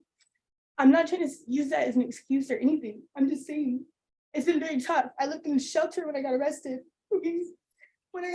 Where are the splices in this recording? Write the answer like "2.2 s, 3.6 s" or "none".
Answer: none